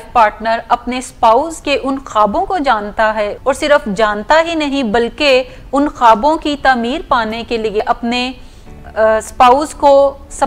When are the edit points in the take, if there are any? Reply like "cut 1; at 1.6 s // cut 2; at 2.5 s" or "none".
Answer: cut 1; at 3.4 s // cut 2; at 7.8 s